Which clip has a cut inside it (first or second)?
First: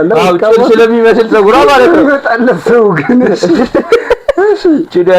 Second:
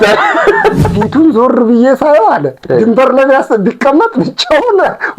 second